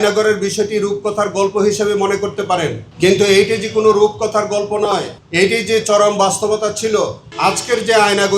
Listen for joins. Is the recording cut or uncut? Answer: cut